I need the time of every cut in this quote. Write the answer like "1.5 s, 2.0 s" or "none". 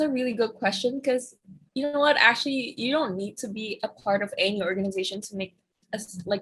none